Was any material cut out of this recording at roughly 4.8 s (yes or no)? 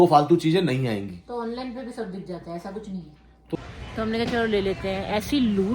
no